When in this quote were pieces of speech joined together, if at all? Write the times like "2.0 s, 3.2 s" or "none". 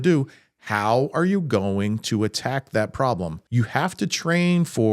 3.4 s